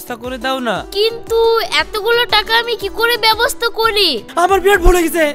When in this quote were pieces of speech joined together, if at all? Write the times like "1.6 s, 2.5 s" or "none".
4.3 s